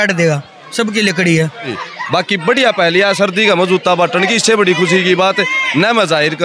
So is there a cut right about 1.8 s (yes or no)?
yes